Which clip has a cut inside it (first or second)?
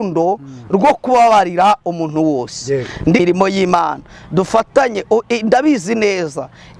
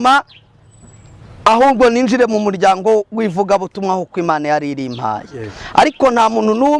first